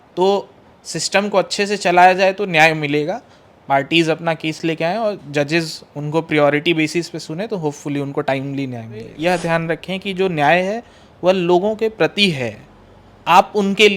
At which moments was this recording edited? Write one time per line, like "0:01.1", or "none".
0:09.1